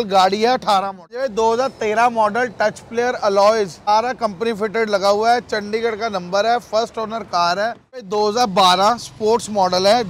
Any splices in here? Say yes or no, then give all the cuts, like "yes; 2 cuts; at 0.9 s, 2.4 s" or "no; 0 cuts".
yes; 3 cuts; at 1.2 s, 3.9 s, 8.1 s